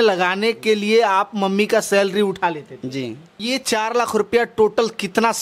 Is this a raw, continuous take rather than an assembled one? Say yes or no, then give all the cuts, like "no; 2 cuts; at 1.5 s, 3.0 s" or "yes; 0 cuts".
no; 1 cut; at 3.4 s